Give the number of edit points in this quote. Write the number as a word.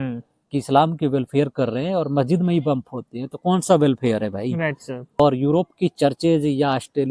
one